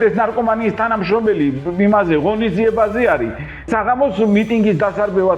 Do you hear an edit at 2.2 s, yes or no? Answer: no